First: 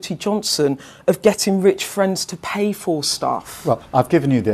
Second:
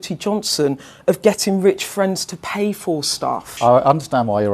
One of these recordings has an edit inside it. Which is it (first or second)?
second